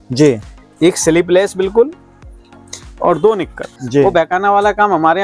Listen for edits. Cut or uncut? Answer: cut